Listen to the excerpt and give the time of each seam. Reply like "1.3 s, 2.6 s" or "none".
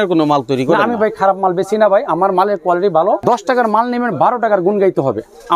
3.2 s